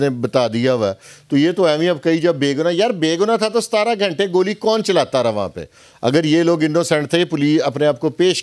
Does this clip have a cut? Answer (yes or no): no